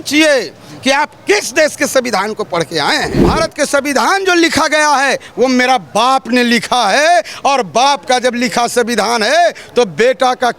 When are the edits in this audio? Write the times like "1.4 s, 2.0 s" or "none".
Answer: 3.3 s